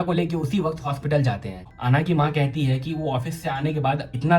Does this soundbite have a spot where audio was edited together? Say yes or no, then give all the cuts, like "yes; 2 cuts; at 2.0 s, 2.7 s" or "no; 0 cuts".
yes; 1 cut; at 1.6 s